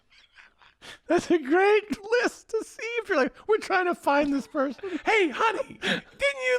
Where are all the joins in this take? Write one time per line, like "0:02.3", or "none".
0:02.0